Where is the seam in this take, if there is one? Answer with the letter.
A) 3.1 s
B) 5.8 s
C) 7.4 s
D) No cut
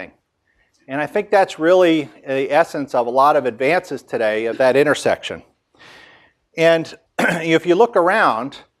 C